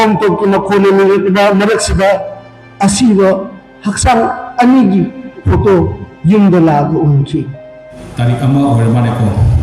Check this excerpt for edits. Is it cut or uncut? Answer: cut